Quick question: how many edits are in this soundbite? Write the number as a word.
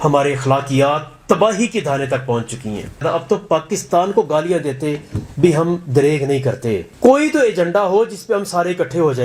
two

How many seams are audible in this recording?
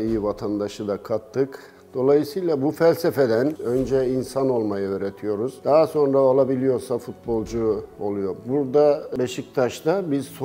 three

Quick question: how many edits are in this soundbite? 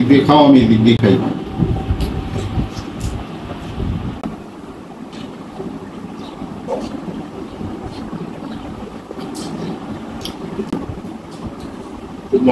one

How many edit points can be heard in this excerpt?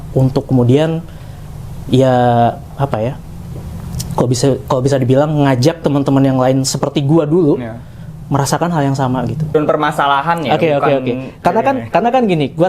one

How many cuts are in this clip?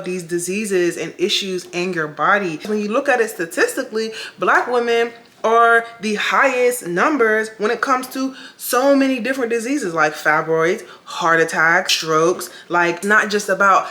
three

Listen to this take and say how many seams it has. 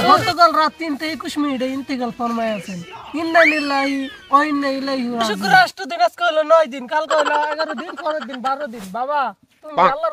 one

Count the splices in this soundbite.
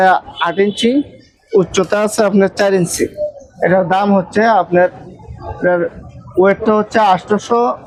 zero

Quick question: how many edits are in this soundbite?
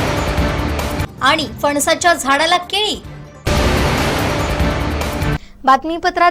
zero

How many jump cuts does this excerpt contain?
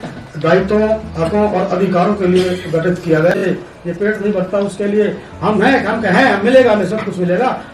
one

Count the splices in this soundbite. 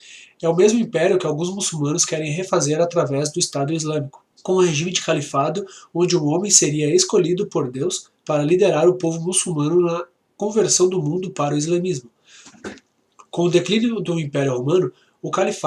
one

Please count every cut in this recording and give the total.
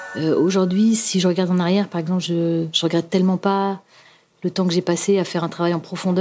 zero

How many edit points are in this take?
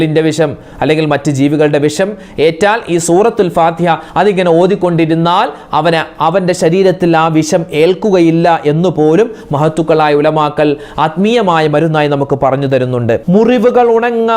one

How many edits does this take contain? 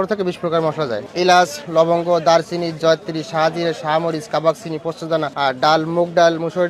two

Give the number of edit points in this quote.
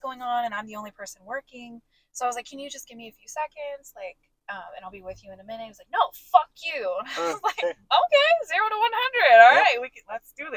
zero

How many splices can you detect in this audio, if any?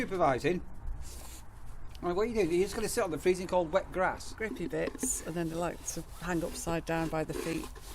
one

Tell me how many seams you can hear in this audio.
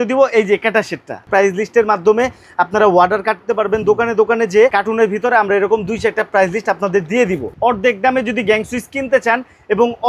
three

